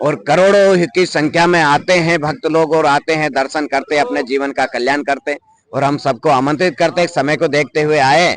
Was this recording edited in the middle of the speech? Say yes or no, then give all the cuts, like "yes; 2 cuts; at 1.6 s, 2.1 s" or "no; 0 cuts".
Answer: no; 0 cuts